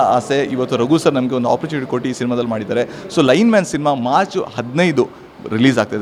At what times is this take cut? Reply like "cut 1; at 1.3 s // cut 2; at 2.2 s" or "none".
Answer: none